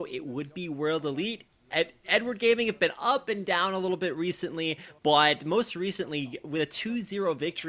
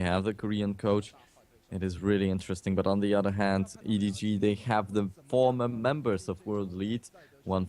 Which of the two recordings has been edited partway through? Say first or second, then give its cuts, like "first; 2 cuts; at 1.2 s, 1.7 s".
first; 1 cut; at 1.0 s